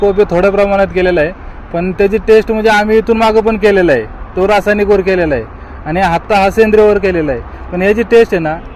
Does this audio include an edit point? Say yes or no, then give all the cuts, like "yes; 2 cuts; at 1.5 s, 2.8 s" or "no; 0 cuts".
no; 0 cuts